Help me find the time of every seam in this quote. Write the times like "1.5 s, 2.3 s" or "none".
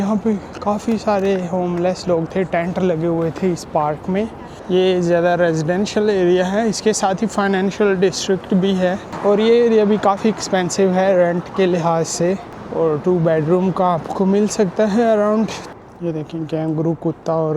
4.5 s, 9.1 s, 12.6 s, 15.7 s